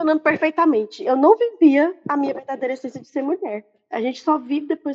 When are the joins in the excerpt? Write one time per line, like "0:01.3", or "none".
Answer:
0:01.0
0:02.0
0:03.8